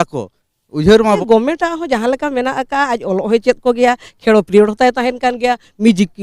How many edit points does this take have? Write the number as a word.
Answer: one